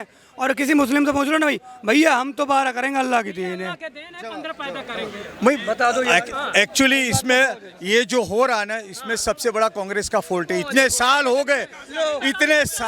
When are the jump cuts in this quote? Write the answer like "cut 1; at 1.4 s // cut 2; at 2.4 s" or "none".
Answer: none